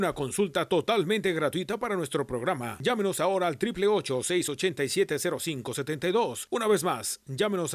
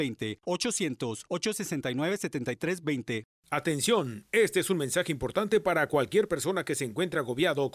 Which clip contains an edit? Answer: second; 1 cut; at 3.3 s

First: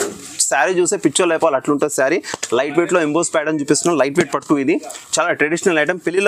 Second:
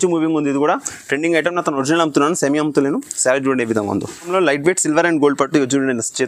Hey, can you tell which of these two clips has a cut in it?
second; 1 cut; at 4.3 s

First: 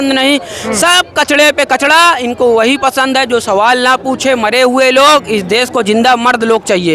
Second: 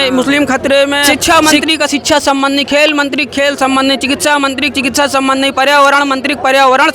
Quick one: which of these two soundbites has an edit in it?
second; 1 cut; at 1.1 s

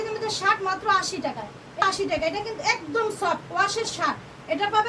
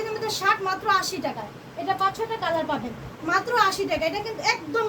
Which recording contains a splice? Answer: first; 1 cut; at 1.8 s

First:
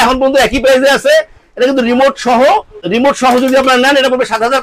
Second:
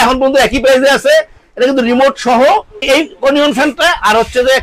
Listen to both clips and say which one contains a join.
second; 1 cut; at 2.7 s

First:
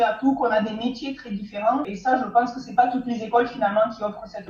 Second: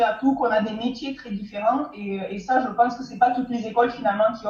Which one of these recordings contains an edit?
first; 1 cut; at 1.9 s

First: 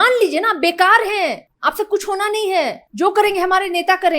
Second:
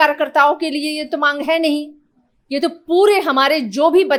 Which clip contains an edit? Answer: first; 2 cuts; at 1.5 s, 2.8 s

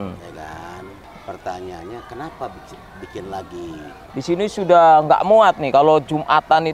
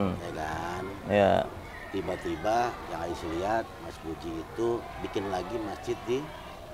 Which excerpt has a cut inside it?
first; 2 cuts; at 1.0 s, 4.0 s

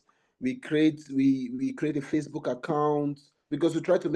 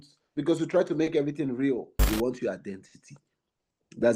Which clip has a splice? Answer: second; 1 cut; at 2.0 s

